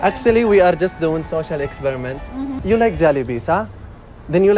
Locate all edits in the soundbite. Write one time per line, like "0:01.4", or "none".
0:02.6